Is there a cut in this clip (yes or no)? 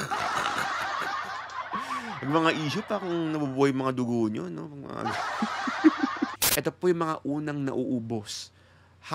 yes